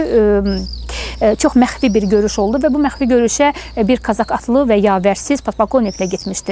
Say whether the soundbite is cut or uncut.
uncut